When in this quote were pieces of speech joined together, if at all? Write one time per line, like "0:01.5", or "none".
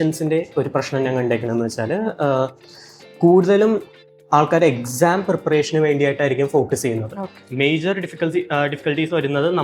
0:07.5